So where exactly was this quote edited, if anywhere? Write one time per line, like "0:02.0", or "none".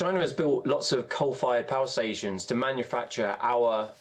none